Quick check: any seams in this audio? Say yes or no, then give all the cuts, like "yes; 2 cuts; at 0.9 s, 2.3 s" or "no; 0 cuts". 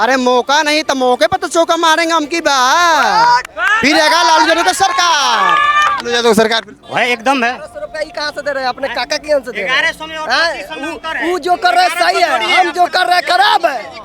yes; 1 cut; at 6.8 s